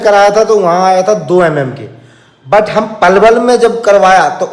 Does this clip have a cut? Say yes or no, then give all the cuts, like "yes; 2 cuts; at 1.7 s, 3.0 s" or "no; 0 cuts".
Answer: no; 0 cuts